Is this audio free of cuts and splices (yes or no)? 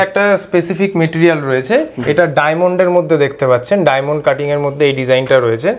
yes